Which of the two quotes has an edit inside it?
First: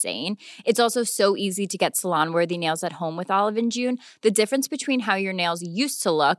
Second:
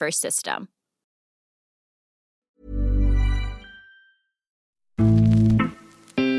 second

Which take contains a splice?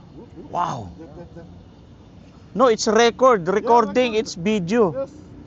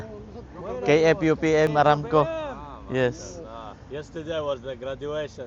second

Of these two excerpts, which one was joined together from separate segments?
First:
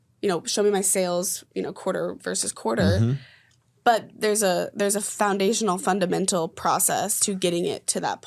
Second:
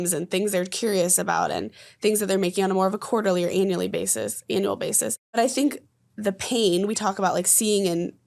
second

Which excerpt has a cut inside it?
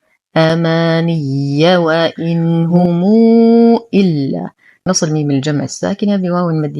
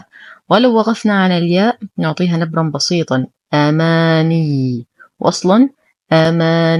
first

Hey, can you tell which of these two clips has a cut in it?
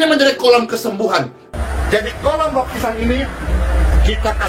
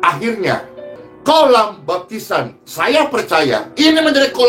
first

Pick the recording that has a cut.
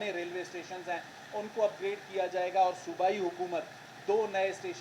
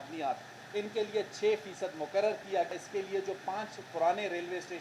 second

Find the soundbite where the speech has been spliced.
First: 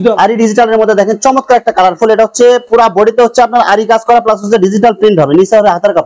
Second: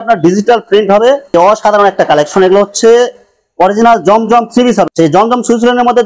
second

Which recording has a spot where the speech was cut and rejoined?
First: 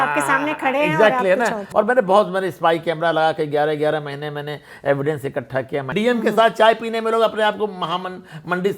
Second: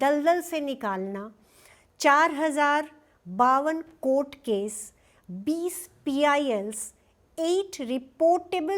first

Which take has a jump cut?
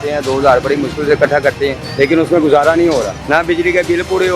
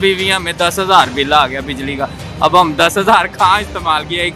first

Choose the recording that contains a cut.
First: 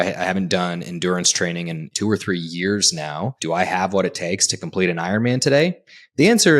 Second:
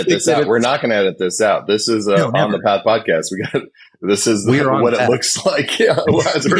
first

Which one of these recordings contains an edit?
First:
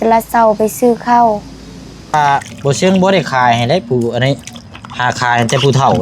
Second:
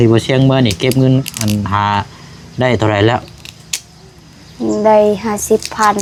first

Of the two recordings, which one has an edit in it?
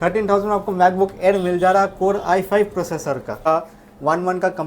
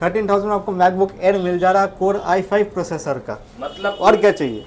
first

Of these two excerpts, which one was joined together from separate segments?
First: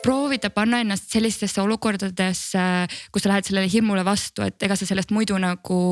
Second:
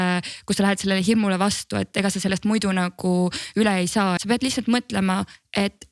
second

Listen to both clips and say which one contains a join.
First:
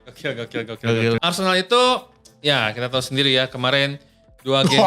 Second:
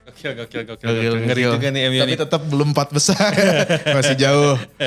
first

